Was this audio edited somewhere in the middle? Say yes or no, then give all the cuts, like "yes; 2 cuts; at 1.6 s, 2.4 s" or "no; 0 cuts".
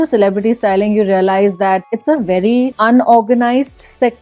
yes; 2 cuts; at 1.8 s, 2.7 s